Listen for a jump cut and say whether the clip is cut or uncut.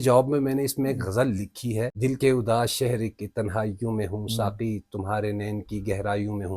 cut